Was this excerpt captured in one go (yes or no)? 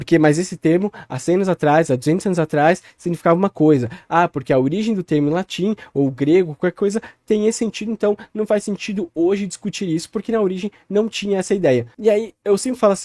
yes